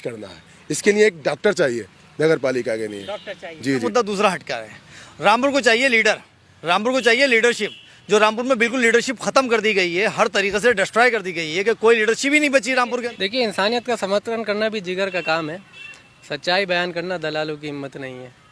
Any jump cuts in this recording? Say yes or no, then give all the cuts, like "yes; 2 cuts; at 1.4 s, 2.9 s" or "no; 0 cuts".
yes; 2 cuts; at 3.8 s, 13.1 s